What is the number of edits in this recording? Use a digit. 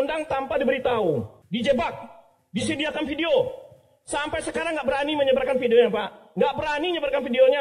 1